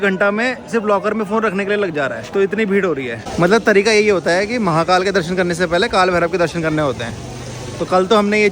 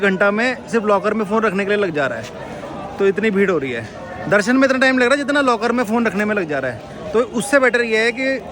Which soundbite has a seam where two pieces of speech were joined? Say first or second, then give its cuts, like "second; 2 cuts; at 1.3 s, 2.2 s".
first; 2 cuts; at 2.2 s, 3.2 s